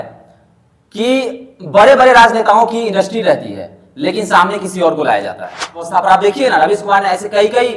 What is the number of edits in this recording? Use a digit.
1